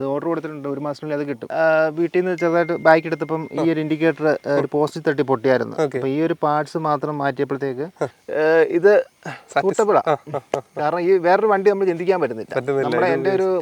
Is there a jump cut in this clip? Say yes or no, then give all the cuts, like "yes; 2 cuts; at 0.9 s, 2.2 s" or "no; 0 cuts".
yes; 2 cuts; at 1.5 s, 8.2 s